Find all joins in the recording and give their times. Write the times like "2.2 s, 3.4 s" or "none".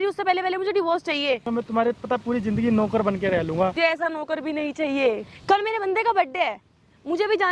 1.5 s, 3.8 s, 5.2 s